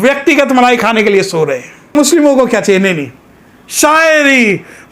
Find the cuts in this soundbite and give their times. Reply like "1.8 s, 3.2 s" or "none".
1.9 s